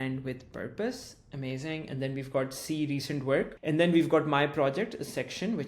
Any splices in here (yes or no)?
yes